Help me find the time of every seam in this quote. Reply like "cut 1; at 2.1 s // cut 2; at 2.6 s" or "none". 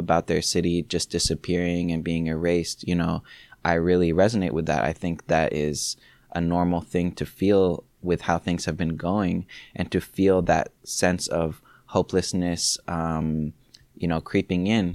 none

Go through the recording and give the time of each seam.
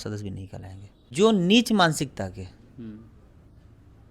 cut 1; at 1.1 s

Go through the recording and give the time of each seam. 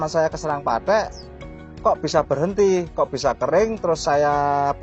none

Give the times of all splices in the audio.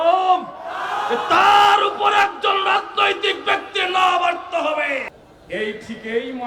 cut 1; at 5.2 s

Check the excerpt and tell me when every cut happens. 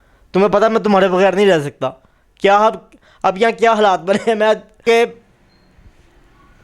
cut 1; at 4.8 s

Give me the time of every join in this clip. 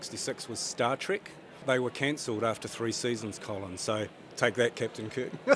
cut 1; at 1.6 s // cut 2; at 4.2 s

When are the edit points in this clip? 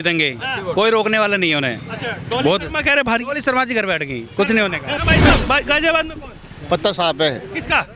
cut 1; at 4.9 s

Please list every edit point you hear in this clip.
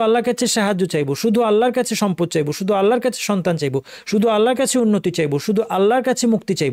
none

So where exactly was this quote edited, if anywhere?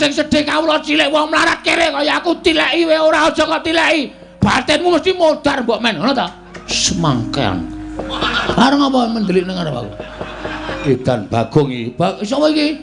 cut 1; at 6.8 s // cut 2; at 8.4 s // cut 3; at 10.8 s

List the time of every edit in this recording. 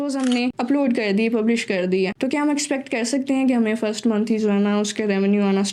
none

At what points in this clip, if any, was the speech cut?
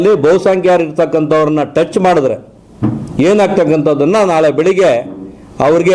none

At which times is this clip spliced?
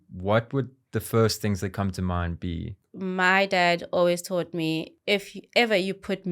cut 1; at 2.8 s // cut 2; at 4.9 s

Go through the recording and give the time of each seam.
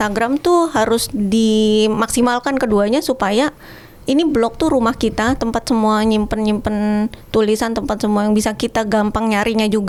none

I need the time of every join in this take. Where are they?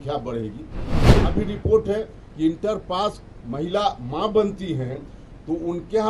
cut 1; at 1.1 s

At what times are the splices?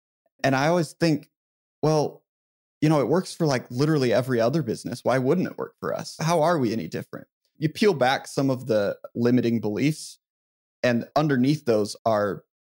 cut 1; at 11.1 s

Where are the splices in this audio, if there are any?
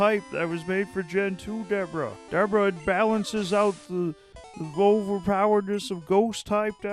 cut 1; at 2.2 s

